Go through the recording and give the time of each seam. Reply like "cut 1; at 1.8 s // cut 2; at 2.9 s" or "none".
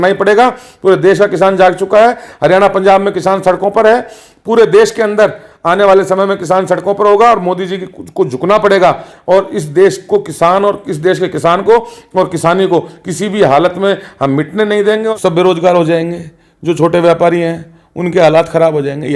cut 1; at 15.1 s